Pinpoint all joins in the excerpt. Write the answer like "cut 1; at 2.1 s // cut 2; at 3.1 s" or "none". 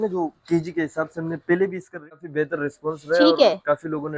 cut 1; at 2.1 s